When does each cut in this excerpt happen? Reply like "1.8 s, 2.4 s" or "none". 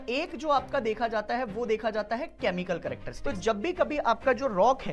3.1 s